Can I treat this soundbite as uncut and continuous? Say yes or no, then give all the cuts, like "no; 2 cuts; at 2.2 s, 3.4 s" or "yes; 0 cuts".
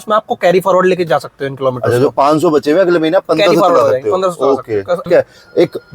no; 1 cut; at 5.0 s